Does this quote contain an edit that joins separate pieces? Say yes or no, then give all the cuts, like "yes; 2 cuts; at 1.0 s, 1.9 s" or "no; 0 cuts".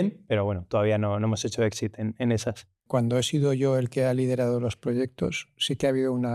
yes; 1 cut; at 2.8 s